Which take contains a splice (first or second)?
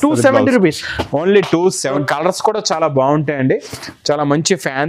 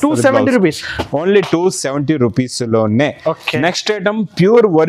first